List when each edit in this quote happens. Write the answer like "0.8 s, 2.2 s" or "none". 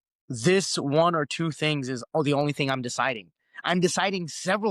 none